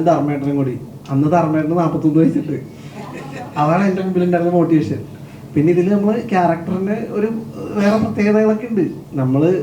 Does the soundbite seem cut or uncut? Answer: uncut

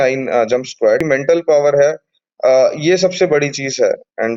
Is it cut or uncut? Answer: cut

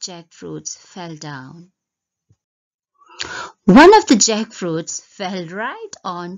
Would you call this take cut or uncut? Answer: cut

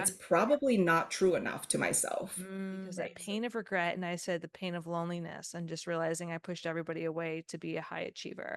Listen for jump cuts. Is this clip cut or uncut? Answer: cut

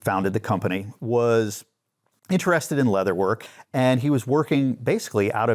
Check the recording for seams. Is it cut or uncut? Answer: cut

